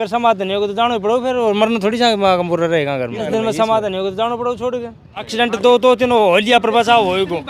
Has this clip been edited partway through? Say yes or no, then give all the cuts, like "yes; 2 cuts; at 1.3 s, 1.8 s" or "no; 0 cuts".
yes; 2 cuts; at 3.3 s, 5.3 s